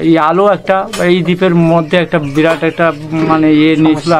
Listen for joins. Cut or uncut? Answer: uncut